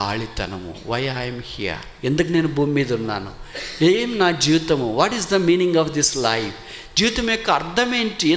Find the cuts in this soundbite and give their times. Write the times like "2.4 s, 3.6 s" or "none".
none